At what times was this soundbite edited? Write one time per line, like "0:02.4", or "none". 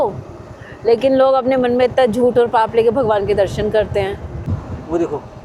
0:04.5